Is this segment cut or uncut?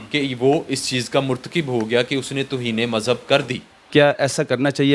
cut